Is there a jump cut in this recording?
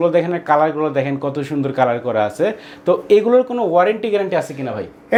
no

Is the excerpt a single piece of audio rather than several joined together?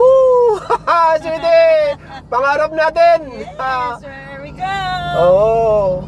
yes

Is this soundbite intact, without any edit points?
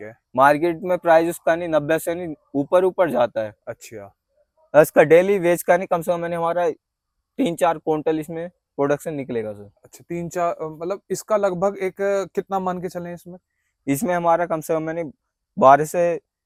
yes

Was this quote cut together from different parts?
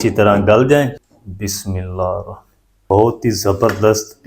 yes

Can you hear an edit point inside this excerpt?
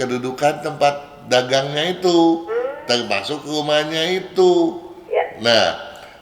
no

